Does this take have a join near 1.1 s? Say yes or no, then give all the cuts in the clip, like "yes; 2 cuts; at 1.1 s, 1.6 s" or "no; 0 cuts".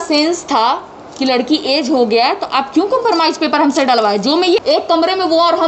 no; 1 cut; at 4.6 s